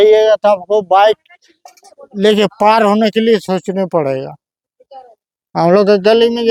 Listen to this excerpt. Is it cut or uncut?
uncut